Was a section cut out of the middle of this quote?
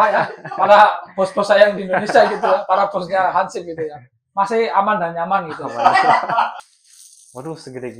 yes; 1 cut; at 6.5 s

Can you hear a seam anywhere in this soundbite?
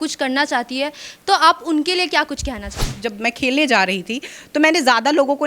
yes; 1 cut; at 3.0 s

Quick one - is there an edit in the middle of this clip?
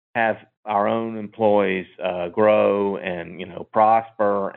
no; 0 cuts

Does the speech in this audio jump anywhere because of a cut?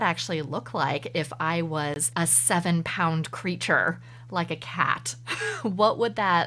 no; 0 cuts

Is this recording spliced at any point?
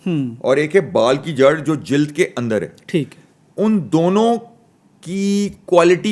no; 0 cuts

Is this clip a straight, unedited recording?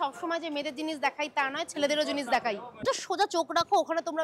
no; 1 cut; at 2.8 s

